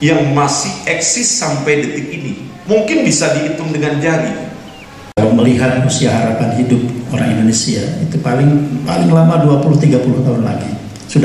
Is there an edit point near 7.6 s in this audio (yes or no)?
no